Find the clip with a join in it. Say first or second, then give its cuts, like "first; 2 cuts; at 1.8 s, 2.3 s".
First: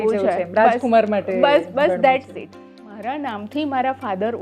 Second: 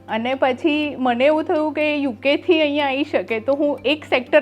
first; 1 cut; at 2.8 s